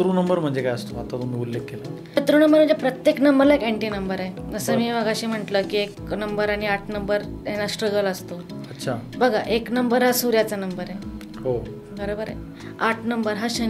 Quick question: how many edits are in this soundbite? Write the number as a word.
one